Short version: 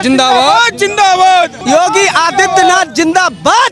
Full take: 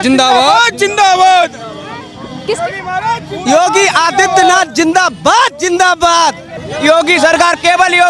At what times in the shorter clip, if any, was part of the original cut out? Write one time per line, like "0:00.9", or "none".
0:01.6